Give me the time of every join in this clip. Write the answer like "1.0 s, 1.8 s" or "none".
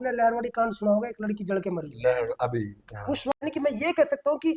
3.4 s